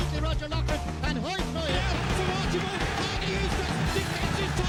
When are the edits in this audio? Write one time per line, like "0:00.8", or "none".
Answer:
none